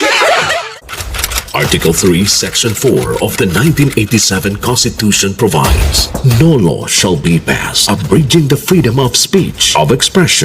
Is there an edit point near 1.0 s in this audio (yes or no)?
yes